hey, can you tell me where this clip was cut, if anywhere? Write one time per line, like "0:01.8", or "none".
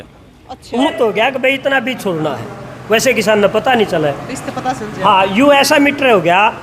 0:00.9